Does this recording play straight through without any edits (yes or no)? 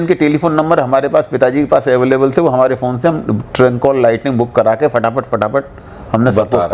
yes